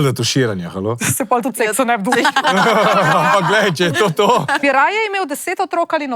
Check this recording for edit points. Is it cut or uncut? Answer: cut